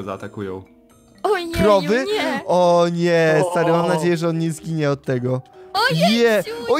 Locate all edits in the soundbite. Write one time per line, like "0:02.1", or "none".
none